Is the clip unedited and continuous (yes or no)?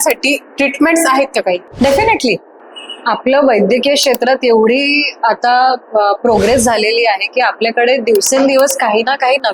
yes